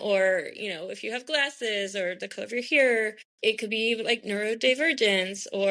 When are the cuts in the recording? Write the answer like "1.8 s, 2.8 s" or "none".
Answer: none